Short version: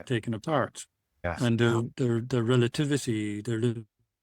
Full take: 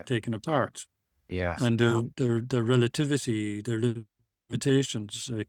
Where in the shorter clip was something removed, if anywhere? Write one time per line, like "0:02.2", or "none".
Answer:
0:01.2